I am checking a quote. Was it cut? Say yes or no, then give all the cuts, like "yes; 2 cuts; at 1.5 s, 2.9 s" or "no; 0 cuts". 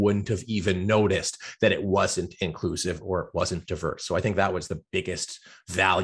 no; 0 cuts